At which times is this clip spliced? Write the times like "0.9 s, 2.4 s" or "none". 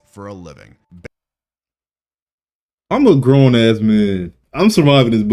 none